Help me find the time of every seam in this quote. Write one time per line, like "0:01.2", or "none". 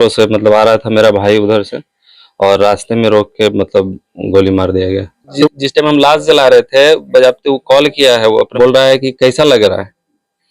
0:05.4
0:08.5